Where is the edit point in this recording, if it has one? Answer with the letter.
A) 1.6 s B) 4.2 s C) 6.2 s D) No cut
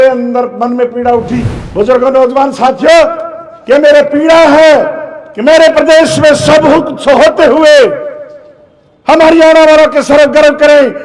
A